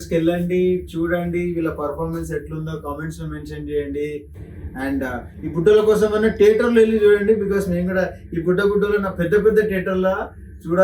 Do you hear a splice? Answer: no; 0 cuts

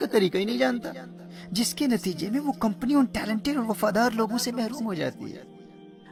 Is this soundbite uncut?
yes; 0 cuts

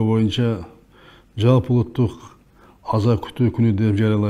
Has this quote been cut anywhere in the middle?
no; 0 cuts

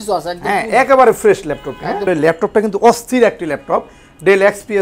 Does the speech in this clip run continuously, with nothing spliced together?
no; 1 cut; at 2.1 s

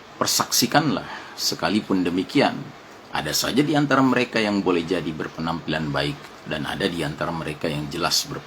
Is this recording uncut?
no; 1 cut; at 6.3 s

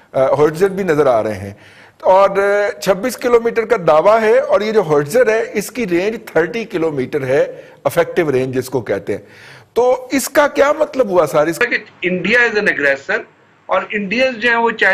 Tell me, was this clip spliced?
yes; 1 cut; at 11.6 s

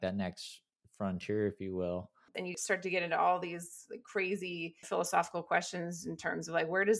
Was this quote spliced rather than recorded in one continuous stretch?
yes; 2 cuts; at 2.5 s, 4.8 s

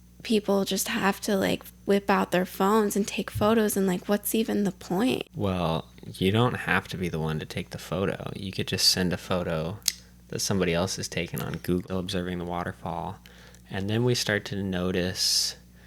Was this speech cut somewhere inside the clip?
yes; 2 cuts; at 5.3 s, 11.8 s

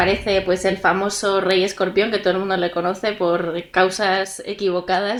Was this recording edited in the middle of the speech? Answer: no; 0 cuts

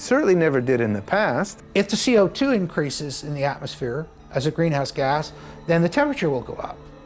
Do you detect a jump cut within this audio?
yes; 1 cut; at 1.6 s

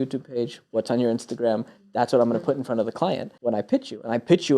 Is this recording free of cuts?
no; 1 cut; at 3.3 s

